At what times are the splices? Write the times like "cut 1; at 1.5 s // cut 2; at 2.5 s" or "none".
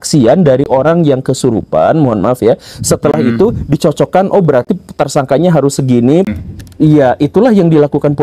cut 1; at 6.3 s